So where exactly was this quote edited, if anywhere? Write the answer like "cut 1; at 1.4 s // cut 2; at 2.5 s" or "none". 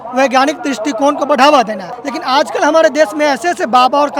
none